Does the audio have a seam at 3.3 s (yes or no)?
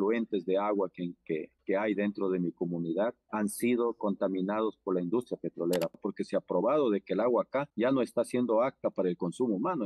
no